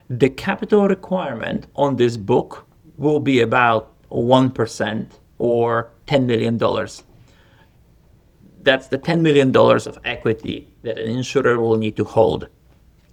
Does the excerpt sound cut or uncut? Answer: uncut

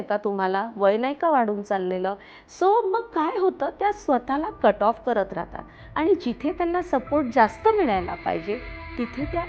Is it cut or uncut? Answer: uncut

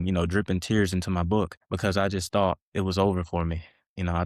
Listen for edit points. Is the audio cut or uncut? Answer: cut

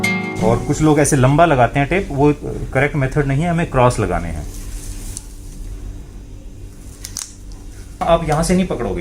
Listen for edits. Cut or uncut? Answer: cut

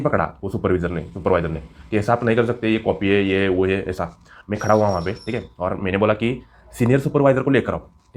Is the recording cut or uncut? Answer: uncut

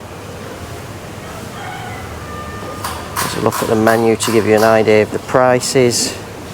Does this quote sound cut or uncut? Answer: uncut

